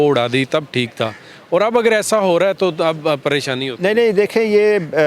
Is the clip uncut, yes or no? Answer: yes